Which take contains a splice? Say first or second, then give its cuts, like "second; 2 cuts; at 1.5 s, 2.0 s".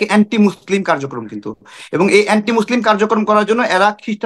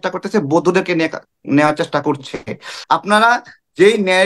second; 1 cut; at 2.7 s